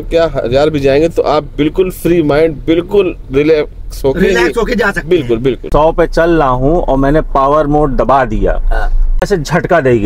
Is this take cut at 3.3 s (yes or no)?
no